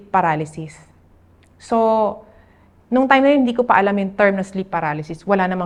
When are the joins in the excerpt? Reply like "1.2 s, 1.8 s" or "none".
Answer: none